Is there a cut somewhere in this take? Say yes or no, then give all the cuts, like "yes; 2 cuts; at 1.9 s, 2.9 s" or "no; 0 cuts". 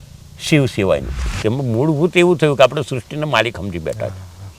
yes; 1 cut; at 1.4 s